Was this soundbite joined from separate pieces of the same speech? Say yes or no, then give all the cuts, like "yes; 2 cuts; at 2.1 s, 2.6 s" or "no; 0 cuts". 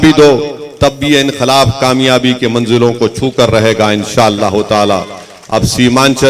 no; 0 cuts